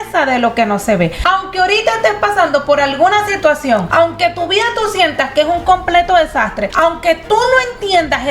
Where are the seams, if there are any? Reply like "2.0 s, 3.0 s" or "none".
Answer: 1.2 s, 3.9 s, 6.6 s